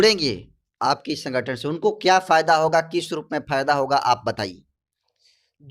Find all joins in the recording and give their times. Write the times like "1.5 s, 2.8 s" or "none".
none